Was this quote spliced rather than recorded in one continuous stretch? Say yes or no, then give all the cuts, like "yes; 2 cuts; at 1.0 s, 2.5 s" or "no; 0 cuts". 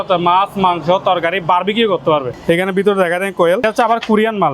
yes; 2 cuts; at 2.3 s, 3.6 s